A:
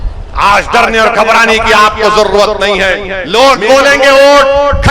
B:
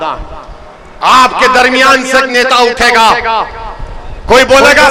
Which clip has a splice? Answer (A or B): A